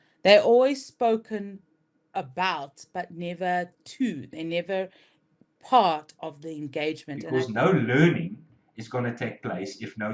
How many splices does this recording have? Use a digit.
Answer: 1